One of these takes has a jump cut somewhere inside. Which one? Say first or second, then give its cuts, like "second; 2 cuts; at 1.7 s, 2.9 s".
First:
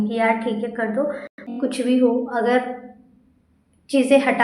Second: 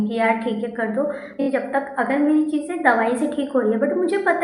first; 1 cut; at 1.4 s